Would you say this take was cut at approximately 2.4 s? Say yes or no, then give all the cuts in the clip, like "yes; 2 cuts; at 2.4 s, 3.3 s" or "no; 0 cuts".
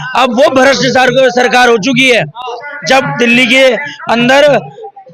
no; 0 cuts